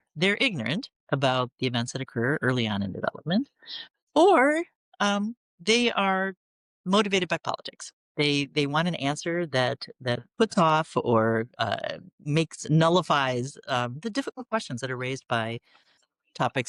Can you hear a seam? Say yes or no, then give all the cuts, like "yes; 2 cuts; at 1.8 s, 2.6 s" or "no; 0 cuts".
no; 0 cuts